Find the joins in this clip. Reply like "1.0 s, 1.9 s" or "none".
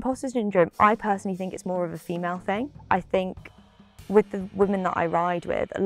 none